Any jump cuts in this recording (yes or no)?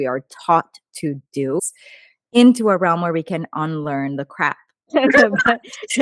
yes